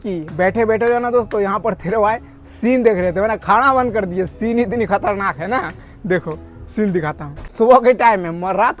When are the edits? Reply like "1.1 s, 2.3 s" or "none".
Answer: 7.5 s

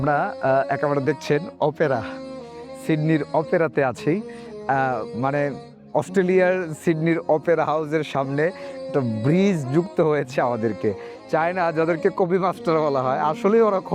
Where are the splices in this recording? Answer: none

